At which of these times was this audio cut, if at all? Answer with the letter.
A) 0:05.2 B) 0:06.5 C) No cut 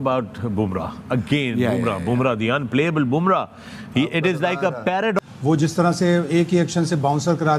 A